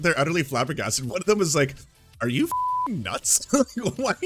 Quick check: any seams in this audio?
no; 0 cuts

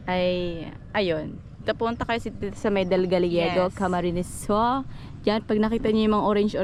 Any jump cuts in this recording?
no; 0 cuts

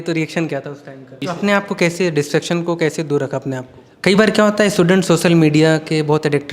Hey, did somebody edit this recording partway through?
yes; 2 cuts; at 1.2 s, 3.8 s

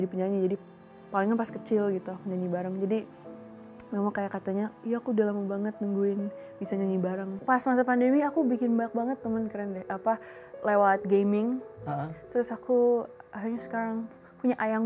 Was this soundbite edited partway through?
yes; 1 cut; at 7.3 s

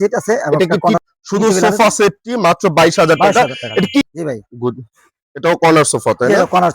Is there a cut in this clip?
yes; 2 cuts; at 1.0 s, 4.0 s

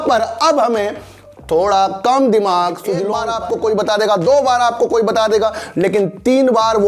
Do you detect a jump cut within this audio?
yes; 1 cut; at 3.3 s

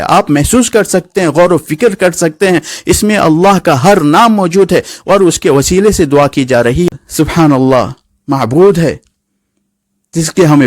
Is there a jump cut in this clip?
yes; 1 cut; at 6.9 s

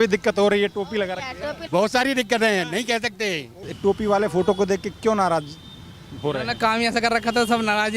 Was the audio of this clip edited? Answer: yes; 2 cuts; at 1.5 s, 3.6 s

